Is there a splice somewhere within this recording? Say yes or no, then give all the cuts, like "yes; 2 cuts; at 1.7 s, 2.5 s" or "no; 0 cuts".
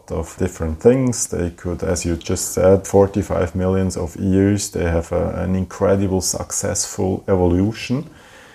no; 0 cuts